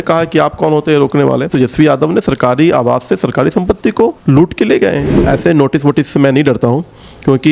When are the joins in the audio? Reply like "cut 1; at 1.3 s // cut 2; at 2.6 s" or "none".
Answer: cut 1; at 1.5 s // cut 2; at 5.2 s